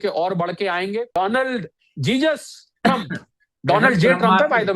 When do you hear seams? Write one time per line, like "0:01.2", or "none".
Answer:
0:01.2